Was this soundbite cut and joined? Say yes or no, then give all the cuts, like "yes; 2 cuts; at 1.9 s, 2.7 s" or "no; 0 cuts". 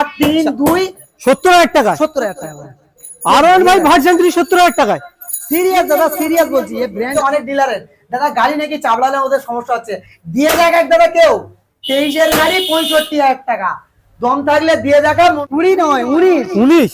yes; 3 cuts; at 1.0 s, 7.1 s, 15.4 s